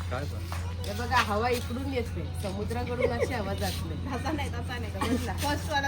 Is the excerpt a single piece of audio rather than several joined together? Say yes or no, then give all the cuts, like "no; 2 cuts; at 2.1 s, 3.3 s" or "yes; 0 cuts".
yes; 0 cuts